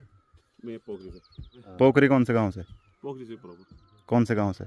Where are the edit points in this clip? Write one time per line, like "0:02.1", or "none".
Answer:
0:01.6